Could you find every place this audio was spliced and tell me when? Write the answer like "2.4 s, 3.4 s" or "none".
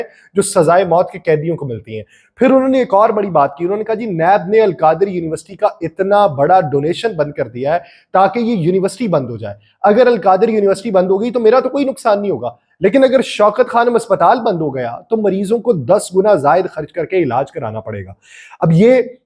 none